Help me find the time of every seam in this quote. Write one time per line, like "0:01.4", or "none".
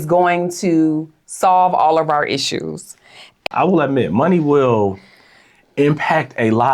0:03.4